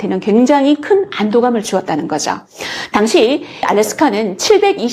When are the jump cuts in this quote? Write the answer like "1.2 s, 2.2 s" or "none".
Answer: 3.7 s